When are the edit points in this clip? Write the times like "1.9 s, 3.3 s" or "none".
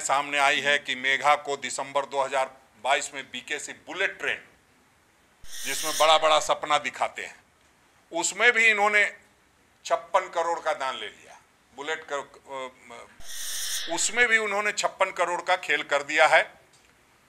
13.3 s